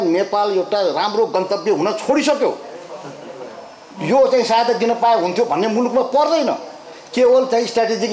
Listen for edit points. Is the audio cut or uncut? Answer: uncut